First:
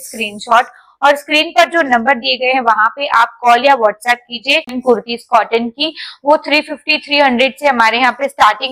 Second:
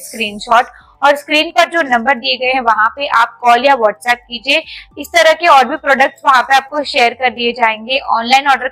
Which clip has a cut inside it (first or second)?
first